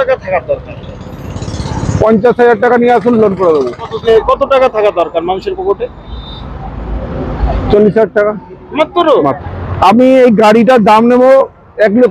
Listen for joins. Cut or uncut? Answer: cut